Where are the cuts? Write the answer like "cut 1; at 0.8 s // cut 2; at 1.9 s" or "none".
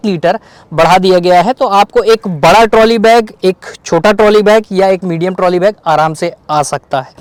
none